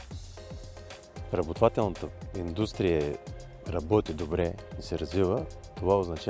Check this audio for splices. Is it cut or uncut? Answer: uncut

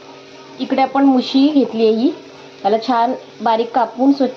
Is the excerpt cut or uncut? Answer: uncut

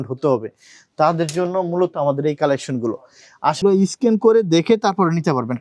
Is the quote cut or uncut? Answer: cut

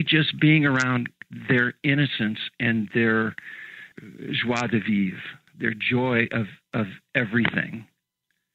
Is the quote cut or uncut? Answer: cut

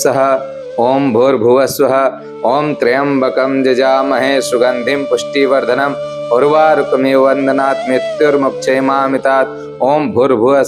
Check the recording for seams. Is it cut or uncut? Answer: uncut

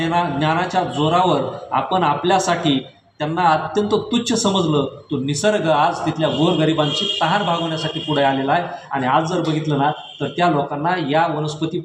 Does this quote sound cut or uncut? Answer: uncut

